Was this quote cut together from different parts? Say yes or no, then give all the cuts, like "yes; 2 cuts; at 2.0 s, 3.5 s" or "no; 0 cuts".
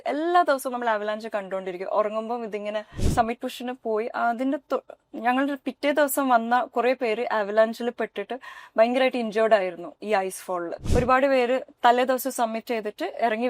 yes; 2 cuts; at 3.1 s, 10.8 s